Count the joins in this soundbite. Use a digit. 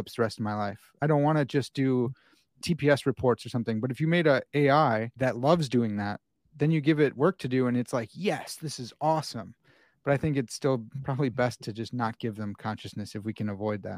3